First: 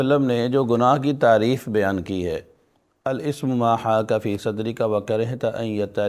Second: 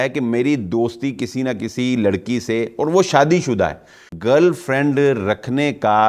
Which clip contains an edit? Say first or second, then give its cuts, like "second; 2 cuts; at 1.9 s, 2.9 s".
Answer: second; 1 cut; at 4.0 s